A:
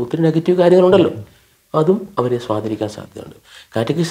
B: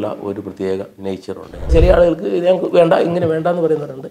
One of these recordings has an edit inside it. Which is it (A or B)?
B